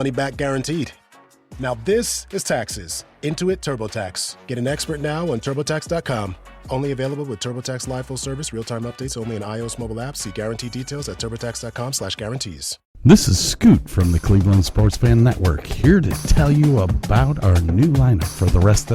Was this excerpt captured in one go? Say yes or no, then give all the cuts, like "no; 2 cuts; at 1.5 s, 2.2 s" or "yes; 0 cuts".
no; 1 cut; at 13.0 s